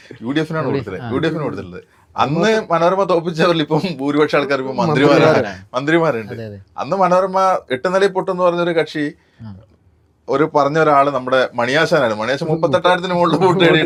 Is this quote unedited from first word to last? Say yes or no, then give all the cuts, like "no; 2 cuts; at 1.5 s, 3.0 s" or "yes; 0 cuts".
yes; 0 cuts